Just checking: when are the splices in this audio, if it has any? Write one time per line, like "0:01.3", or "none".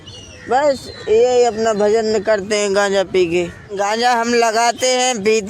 0:03.7